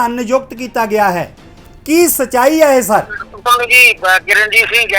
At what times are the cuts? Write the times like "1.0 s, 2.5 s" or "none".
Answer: 3.2 s

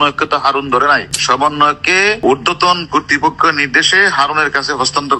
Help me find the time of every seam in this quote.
1.1 s, 2.2 s

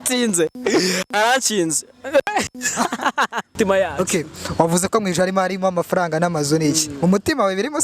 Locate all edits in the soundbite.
3.5 s

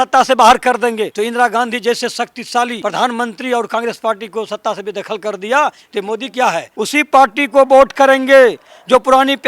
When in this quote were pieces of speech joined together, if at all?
1.1 s, 2.8 s, 6.7 s

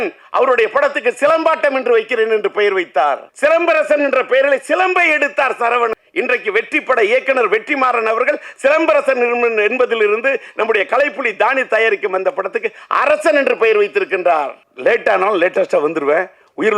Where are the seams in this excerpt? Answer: 3.3 s, 5.9 s, 14.6 s

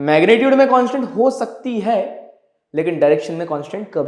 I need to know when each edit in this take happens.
none

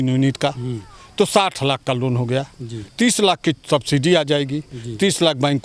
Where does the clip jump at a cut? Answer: none

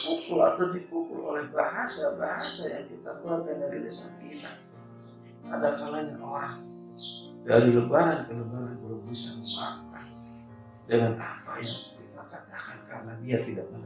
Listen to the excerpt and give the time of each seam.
none

